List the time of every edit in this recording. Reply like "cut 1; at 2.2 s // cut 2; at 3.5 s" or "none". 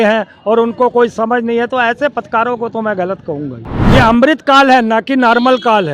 cut 1; at 3.7 s